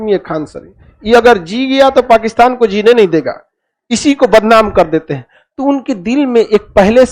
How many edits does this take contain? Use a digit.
0